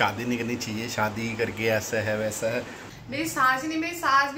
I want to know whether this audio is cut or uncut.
cut